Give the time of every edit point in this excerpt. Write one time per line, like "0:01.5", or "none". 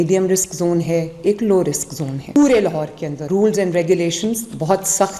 none